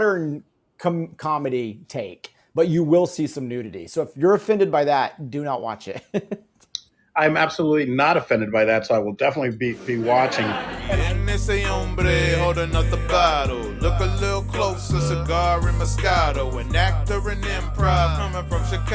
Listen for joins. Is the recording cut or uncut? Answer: cut